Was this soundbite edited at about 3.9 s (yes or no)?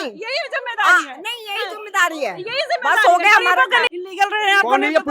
yes